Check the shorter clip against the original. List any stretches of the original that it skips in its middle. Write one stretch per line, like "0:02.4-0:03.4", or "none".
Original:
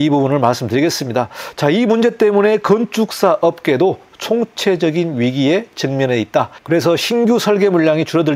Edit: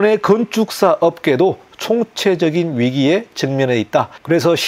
none